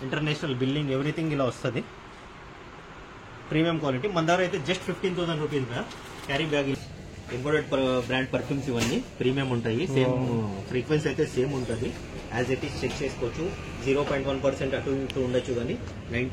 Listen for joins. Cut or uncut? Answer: cut